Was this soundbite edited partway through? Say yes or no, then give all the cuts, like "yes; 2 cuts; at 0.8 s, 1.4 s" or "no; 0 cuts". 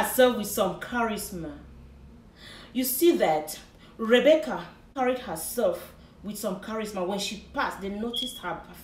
yes; 1 cut; at 4.9 s